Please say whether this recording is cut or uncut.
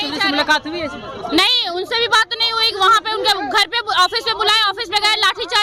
uncut